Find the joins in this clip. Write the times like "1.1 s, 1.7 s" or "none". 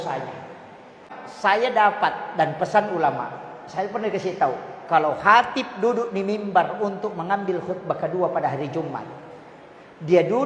1.0 s